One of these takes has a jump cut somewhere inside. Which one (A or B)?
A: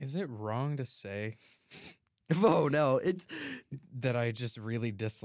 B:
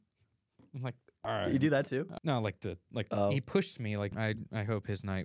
B